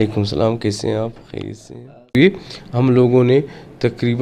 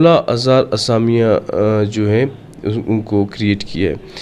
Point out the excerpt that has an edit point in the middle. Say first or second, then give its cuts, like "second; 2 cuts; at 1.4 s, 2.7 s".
first; 1 cut; at 2.2 s